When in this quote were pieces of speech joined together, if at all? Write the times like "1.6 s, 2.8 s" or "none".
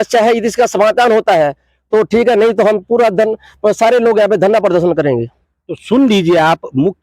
none